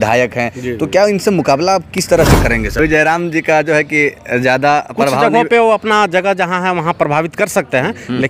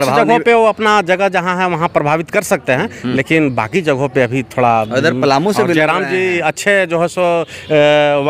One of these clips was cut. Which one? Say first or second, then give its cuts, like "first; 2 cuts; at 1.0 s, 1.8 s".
first; 1 cut; at 2.8 s